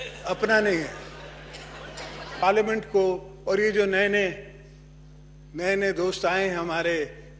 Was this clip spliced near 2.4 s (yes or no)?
yes